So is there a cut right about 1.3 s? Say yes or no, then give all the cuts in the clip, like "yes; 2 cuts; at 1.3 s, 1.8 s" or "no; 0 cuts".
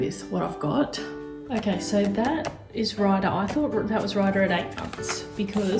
yes; 1 cut; at 1.3 s